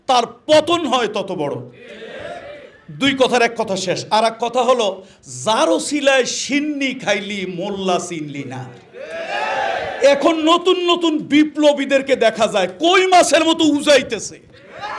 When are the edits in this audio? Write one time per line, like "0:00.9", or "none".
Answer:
none